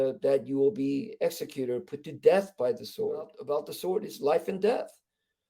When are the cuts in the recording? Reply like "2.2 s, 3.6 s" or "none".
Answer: 3.4 s